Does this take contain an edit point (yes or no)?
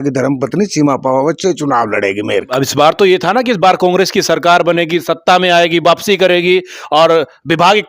yes